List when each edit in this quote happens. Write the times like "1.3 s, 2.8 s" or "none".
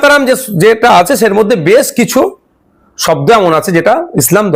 none